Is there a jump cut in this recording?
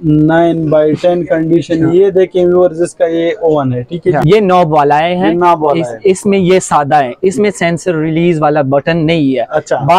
yes; 1 cut; at 4.2 s

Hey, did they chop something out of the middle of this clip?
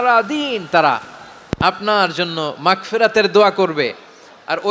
no; 0 cuts

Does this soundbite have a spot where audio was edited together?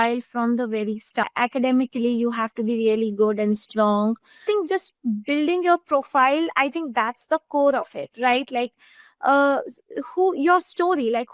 yes; 2 cuts; at 1.3 s, 4.5 s

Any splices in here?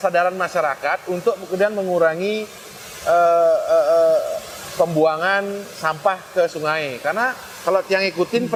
no; 0 cuts

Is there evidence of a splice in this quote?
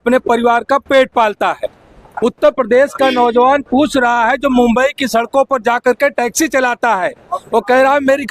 no; 0 cuts

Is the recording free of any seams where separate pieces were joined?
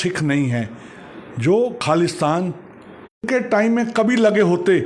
no; 1 cut; at 3.2 s

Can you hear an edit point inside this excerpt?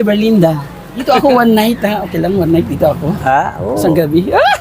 yes; 1 cut; at 0.9 s

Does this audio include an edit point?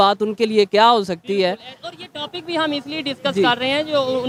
no; 0 cuts

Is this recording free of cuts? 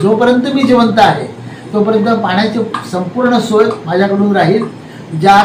yes; 0 cuts

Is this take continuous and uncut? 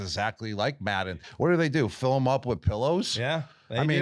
no; 1 cut; at 1.2 s

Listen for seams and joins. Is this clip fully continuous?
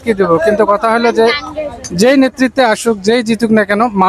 yes; 0 cuts

